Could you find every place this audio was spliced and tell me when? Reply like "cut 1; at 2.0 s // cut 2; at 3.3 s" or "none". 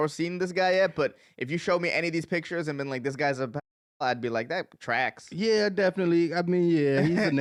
none